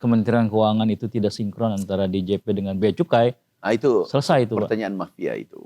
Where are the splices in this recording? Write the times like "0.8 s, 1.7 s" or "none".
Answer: none

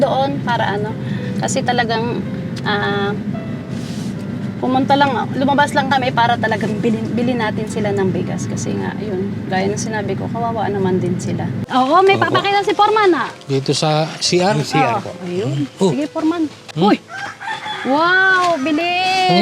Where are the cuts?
11.6 s, 16.6 s

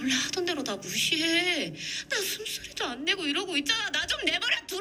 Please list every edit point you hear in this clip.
none

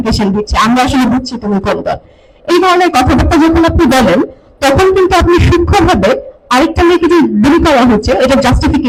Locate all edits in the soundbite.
none

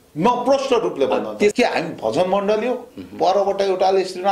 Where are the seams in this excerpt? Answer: 1.5 s

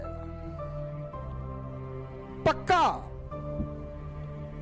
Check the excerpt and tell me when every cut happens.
3.0 s

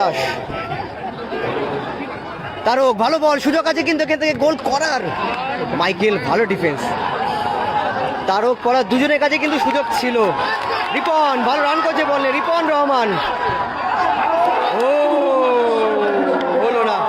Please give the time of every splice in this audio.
none

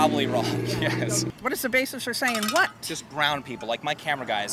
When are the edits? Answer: 1.3 s

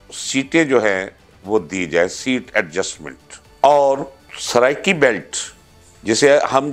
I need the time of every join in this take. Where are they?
none

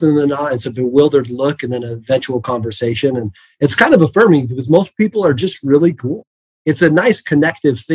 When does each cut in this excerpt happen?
6.3 s

